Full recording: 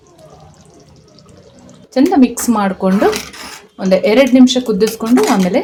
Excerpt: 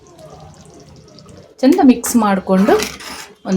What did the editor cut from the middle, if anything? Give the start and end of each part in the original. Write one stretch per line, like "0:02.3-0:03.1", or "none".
0:01.5-0:01.8